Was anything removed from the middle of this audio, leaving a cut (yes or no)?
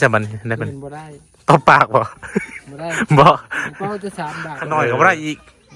yes